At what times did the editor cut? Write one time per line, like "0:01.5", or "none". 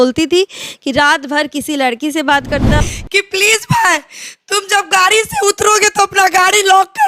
0:02.8